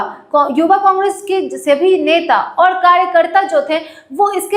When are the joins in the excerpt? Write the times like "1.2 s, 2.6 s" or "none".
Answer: none